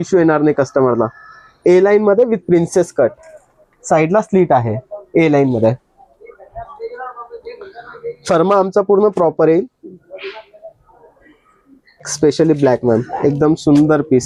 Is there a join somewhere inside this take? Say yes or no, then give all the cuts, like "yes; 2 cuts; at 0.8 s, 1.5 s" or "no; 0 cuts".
no; 0 cuts